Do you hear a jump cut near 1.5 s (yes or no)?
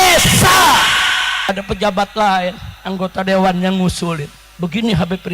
yes